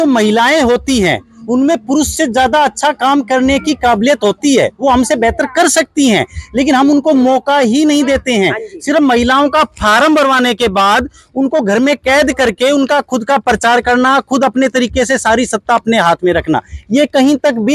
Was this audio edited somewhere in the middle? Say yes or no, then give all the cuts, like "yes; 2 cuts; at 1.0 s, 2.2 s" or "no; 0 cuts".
no; 0 cuts